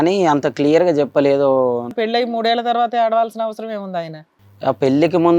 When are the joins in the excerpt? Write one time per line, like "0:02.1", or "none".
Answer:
0:02.0
0:04.2